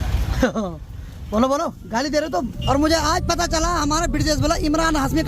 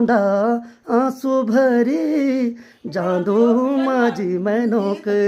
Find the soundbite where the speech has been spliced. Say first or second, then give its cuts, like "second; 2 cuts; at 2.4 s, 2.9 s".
first; 1 cut; at 2.5 s